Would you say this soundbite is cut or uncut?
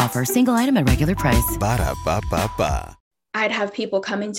cut